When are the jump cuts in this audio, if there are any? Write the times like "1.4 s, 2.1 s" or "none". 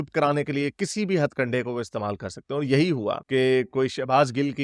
none

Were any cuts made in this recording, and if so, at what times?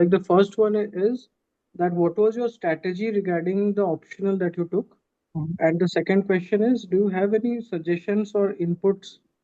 none

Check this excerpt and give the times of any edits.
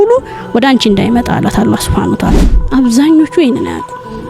2.6 s

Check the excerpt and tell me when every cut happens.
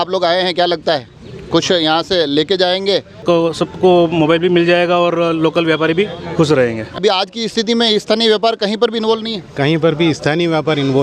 3.2 s, 7.0 s

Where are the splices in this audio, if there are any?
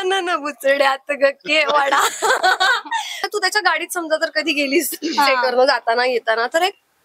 3.3 s

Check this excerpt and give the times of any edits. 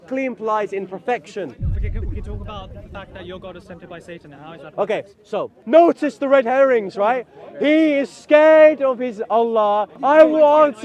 5.6 s, 9.9 s

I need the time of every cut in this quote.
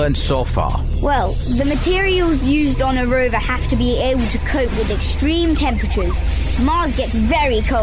none

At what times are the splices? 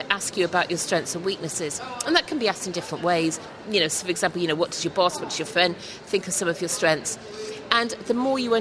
none

